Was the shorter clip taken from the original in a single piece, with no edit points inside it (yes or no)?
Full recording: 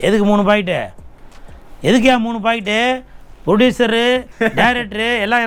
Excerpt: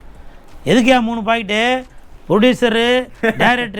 yes